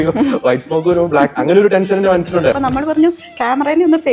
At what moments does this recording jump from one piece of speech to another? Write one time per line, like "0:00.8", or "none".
0:02.6

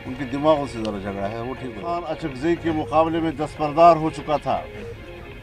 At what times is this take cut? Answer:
0:01.9

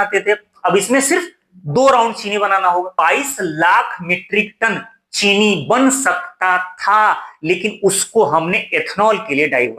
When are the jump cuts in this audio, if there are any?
0:02.9

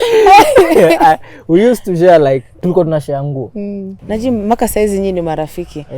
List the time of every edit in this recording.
0:03.9

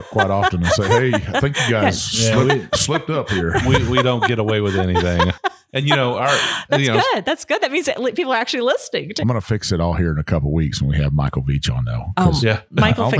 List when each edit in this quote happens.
0:09.1

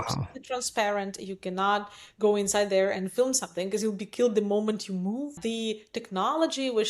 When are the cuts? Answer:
0:05.4

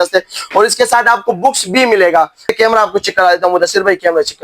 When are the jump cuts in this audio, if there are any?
0:02.5

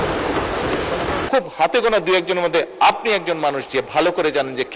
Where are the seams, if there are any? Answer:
0:01.2

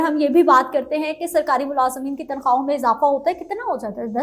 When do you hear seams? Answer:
none

